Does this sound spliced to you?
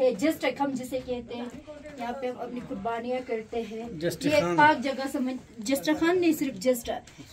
no; 0 cuts

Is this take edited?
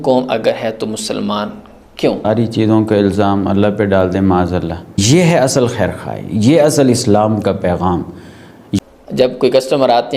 yes; 3 cuts; at 2.3 s, 5.0 s, 8.8 s

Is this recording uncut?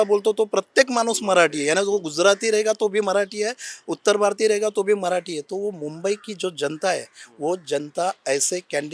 yes; 0 cuts

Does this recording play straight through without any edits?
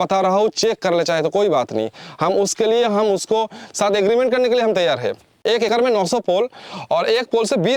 no; 1 cut; at 5.7 s

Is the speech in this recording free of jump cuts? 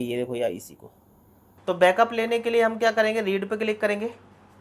no; 1 cut; at 1.0 s

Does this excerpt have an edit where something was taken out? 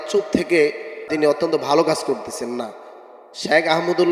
yes; 1 cut; at 1.1 s

